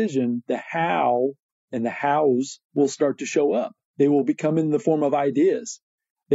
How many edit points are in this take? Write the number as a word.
one